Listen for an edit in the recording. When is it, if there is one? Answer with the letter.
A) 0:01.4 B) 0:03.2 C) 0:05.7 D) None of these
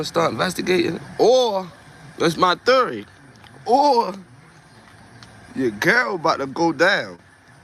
D